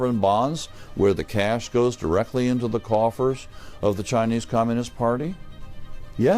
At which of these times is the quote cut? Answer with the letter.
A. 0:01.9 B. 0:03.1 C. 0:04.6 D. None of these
D